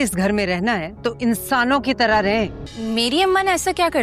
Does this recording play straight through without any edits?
no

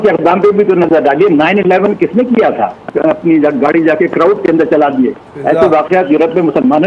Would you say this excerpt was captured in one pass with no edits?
no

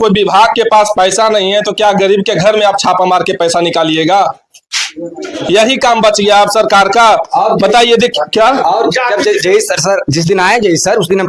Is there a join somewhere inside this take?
no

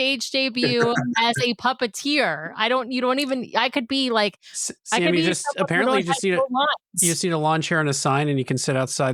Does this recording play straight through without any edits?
yes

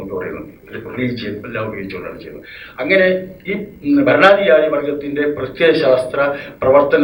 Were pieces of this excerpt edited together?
no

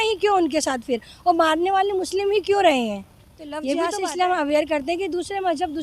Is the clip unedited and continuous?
no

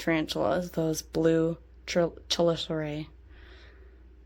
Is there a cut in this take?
no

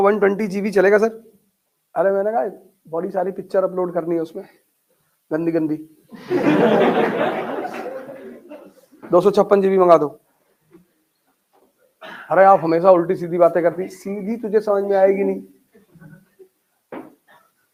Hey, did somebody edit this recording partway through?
no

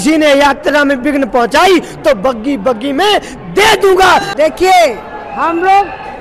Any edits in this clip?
yes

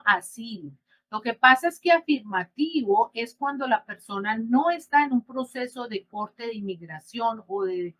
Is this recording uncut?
yes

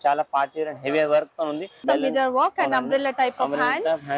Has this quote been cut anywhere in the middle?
yes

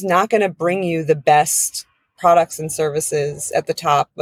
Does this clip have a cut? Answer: no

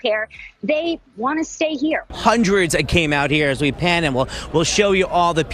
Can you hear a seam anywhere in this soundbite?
yes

